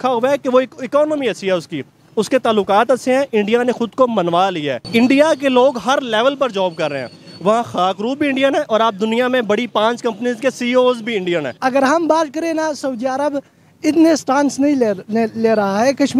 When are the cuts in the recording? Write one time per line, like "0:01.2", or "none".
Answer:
0:04.8
0:11.6